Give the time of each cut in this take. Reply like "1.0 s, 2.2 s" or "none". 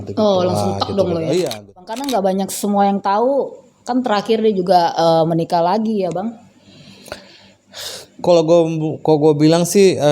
2.0 s